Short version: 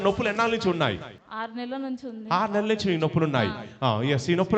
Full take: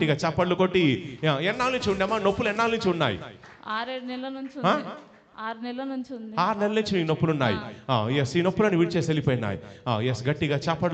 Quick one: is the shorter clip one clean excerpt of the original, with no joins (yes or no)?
no